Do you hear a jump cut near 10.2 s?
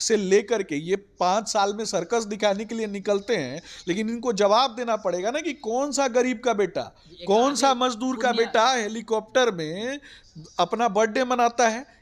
no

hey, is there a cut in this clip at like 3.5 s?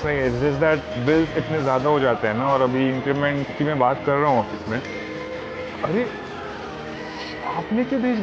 no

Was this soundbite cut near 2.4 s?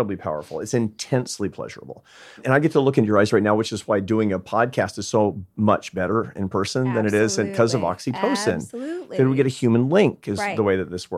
yes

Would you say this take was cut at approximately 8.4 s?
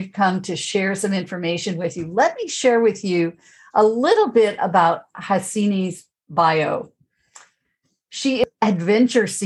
yes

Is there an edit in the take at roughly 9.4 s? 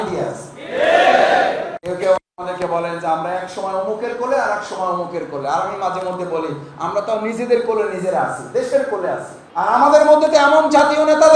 yes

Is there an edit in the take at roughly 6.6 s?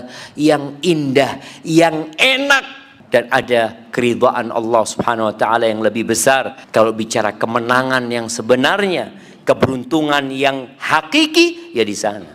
yes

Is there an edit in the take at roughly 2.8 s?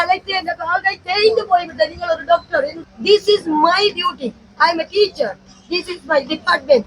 yes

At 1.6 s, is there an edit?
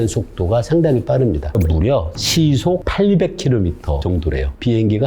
yes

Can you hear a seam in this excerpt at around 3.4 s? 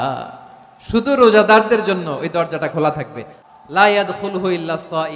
yes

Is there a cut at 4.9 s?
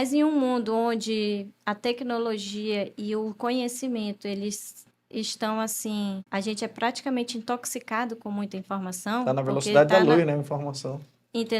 no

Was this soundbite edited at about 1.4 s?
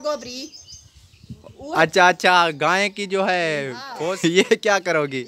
no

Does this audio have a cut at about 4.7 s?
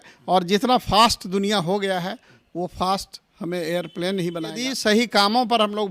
yes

